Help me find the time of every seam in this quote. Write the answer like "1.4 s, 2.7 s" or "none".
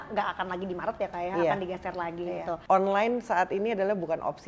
2.5 s